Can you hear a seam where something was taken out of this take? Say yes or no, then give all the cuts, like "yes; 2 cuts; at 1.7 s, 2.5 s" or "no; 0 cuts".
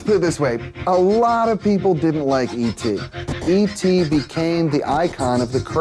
yes; 1 cut; at 3.2 s